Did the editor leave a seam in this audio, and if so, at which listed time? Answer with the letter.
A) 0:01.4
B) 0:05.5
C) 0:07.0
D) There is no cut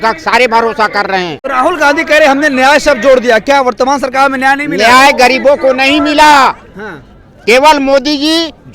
A